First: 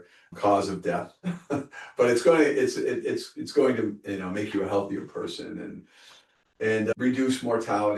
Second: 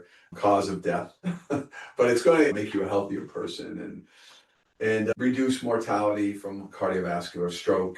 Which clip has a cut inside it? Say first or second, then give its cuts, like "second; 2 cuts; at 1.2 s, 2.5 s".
second; 1 cut; at 2.5 s